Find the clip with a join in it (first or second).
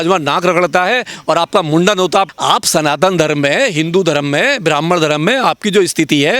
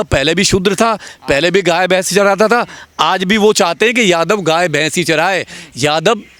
first